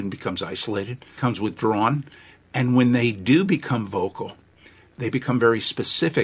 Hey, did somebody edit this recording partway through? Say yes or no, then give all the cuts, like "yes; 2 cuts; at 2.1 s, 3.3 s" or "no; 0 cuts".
yes; 2 cuts; at 1.0 s, 4.9 s